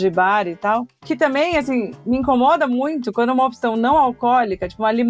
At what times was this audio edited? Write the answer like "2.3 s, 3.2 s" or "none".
0.9 s